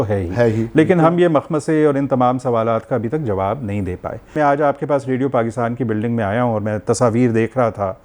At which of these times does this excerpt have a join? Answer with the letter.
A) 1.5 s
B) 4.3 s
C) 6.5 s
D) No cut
B